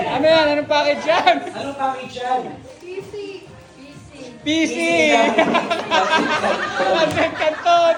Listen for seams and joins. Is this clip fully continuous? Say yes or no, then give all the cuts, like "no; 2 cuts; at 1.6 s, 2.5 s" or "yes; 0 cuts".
yes; 0 cuts